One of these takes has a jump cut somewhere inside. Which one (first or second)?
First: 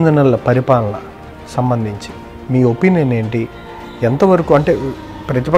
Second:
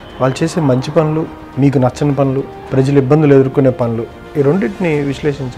second